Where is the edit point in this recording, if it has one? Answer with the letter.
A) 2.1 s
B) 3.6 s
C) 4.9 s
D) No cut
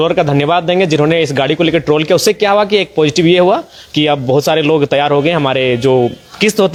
D